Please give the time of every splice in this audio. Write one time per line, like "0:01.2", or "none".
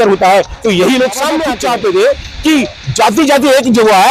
0:01.5